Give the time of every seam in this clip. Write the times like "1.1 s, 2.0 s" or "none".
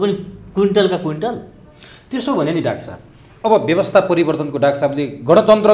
none